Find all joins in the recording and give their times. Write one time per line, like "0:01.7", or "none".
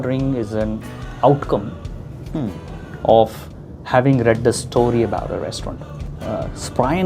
0:06.1